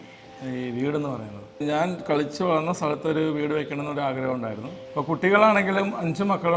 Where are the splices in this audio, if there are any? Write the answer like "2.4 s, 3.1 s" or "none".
1.4 s, 4.7 s